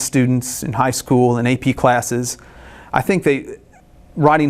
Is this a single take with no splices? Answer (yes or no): yes